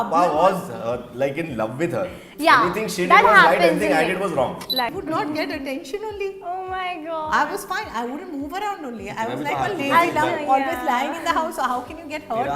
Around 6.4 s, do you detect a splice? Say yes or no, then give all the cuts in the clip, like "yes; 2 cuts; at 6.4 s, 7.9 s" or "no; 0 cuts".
no; 1 cut; at 4.9 s